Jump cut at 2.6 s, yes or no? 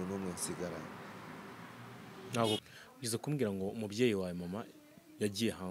yes